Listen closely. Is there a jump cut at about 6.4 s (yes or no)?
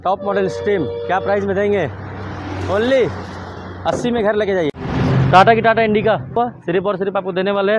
yes